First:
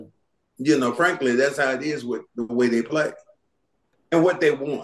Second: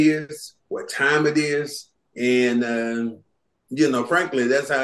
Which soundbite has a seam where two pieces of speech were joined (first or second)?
first